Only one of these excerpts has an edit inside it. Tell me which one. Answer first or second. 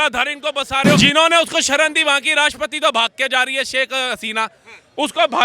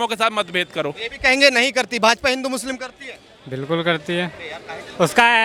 first